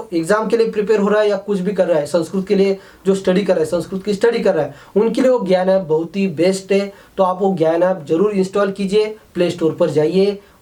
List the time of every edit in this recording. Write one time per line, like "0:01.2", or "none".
none